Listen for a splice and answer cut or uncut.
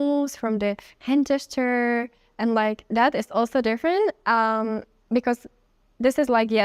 uncut